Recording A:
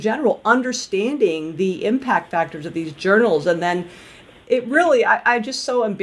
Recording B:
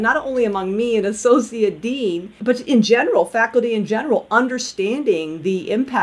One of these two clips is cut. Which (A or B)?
B